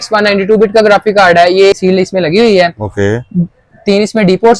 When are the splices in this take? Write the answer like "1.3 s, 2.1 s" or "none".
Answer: 1.7 s